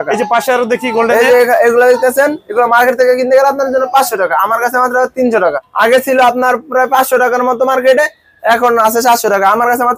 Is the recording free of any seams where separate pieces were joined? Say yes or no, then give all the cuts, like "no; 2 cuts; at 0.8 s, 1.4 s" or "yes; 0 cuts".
no; 1 cut; at 5.6 s